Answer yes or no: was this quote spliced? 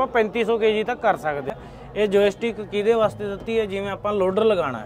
yes